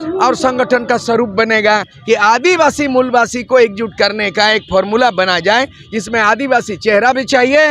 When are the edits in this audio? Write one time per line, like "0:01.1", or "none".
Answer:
0:01.9